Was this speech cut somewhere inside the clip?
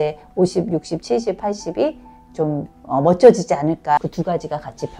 yes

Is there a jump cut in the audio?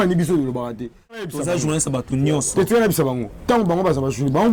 yes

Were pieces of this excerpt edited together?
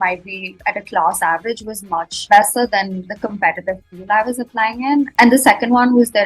yes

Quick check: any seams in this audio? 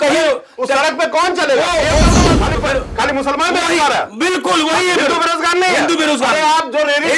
yes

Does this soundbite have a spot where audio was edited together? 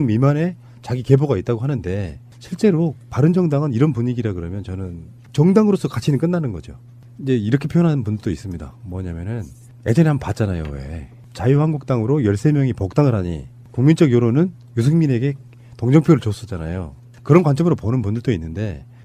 no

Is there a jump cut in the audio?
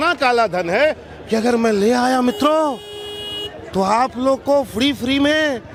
no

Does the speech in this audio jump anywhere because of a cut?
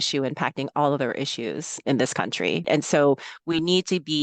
yes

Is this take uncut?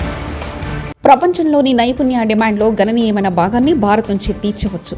no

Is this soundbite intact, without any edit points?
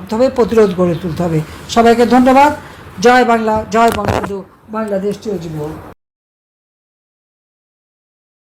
yes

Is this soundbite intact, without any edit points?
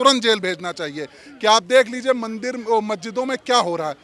yes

